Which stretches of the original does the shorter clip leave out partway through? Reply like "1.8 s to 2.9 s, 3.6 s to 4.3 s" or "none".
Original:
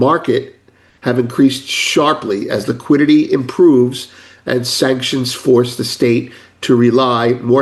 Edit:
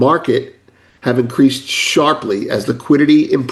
none